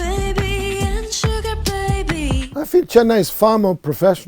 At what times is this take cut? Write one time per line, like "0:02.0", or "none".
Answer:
0:02.5

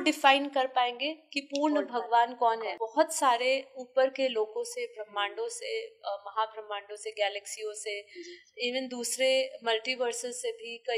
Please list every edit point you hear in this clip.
0:02.7

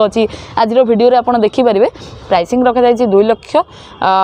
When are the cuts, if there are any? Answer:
0:02.2

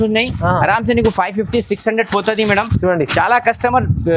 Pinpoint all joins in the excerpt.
none

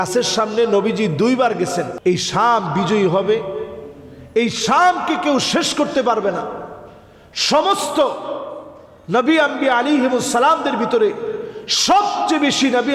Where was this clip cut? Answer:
0:01.9

